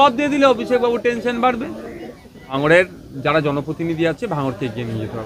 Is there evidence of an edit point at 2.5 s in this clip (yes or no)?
yes